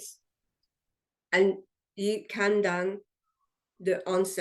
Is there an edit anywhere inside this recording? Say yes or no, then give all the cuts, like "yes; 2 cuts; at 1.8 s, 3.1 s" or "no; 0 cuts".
yes; 1 cut; at 2.3 s